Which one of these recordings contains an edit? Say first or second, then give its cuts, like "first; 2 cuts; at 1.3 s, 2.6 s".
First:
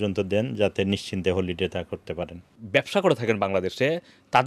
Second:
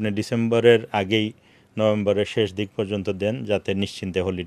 first; 1 cut; at 2.5 s